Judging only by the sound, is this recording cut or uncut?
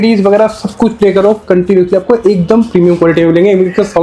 uncut